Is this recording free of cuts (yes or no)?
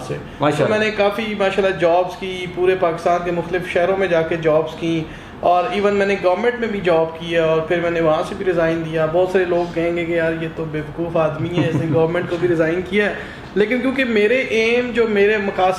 yes